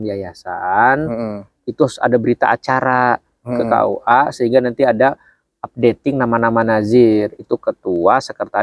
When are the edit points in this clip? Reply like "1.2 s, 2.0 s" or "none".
none